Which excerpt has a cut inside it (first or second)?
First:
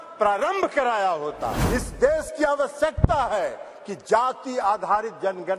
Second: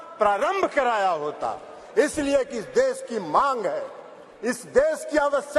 first